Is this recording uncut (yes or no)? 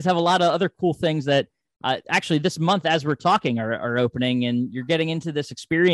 yes